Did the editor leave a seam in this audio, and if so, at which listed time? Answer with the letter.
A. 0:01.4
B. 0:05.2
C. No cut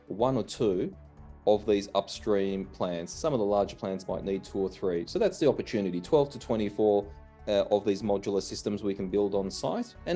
C